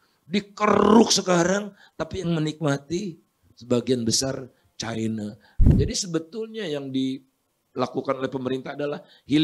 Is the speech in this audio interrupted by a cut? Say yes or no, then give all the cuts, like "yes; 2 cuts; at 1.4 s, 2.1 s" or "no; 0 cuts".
yes; 1 cut; at 5.5 s